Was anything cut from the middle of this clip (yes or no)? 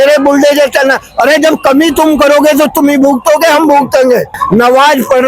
yes